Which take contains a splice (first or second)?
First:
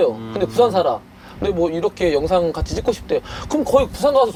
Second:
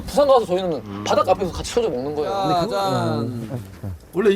second